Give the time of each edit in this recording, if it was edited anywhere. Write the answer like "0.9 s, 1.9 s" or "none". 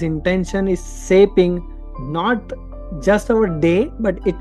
none

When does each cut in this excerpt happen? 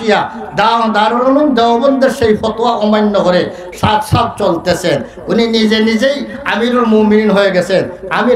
none

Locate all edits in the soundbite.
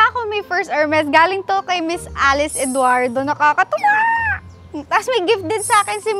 none

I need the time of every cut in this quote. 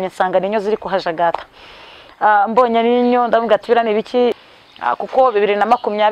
4.3 s

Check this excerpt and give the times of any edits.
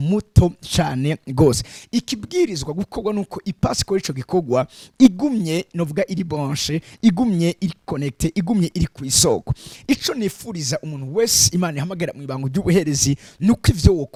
none

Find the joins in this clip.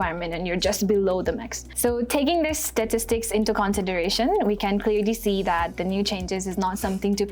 1.7 s

